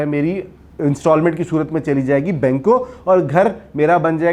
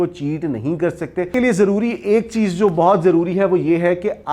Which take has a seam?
second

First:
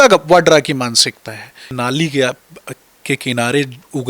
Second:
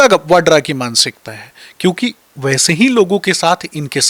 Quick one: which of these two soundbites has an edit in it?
first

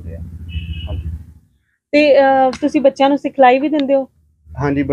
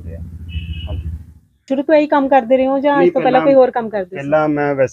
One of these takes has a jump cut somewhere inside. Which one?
second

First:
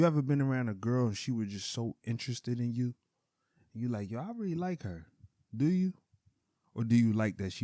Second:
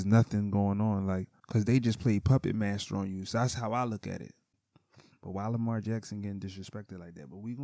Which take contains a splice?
second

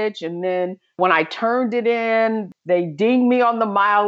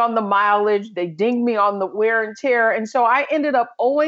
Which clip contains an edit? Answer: first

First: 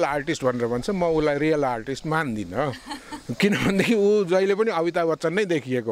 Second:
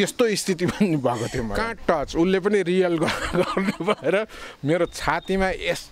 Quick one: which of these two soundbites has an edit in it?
second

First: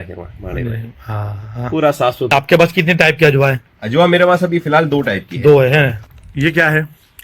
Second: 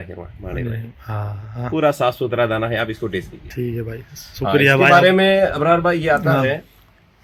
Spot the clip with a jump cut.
first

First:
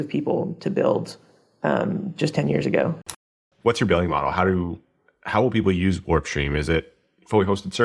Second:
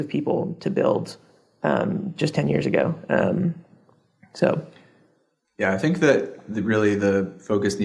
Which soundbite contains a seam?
first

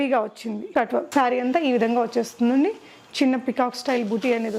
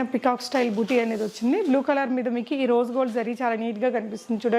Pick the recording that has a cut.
first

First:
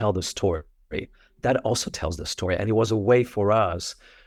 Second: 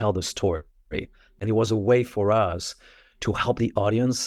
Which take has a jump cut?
second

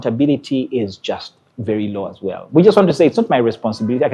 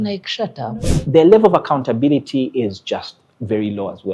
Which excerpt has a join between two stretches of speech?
second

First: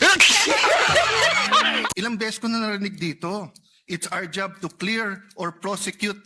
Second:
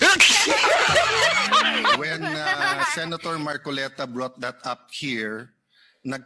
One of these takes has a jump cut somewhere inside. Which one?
first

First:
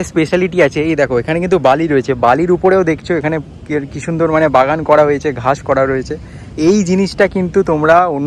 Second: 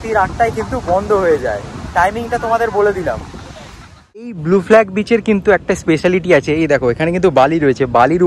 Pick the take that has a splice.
second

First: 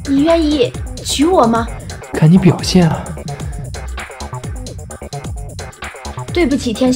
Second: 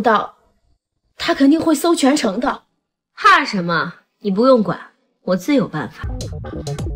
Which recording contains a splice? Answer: second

